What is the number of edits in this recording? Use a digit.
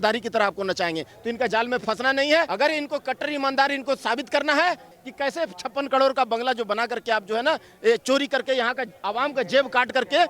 2